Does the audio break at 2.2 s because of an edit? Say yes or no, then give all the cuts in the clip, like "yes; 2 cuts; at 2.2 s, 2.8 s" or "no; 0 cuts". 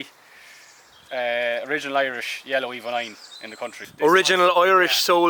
no; 1 cut; at 3.8 s